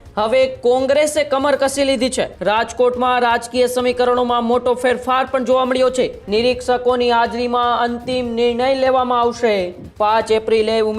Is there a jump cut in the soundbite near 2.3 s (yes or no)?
yes